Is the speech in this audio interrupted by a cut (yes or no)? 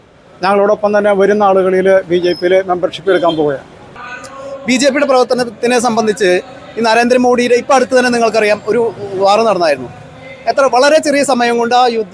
yes